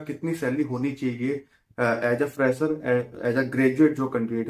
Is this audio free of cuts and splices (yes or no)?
yes